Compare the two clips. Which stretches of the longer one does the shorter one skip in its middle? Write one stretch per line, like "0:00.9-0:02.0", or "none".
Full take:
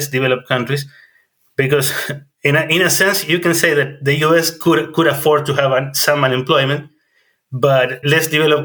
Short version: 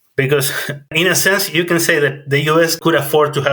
0:02.3-0:02.7
0:04.5-0:04.9